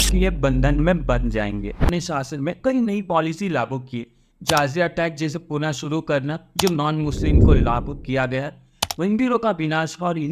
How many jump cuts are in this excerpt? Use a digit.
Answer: 1